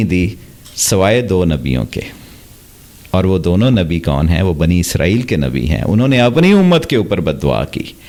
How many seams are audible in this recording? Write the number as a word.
zero